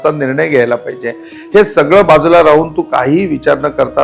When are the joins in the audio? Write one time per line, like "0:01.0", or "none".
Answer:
none